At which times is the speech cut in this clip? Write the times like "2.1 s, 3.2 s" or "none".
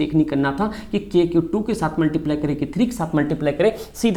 none